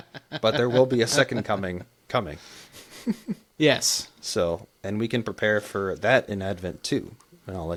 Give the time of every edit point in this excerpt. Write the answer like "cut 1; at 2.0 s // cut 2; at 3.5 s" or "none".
none